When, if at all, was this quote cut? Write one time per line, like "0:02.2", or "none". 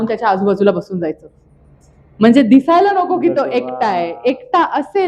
none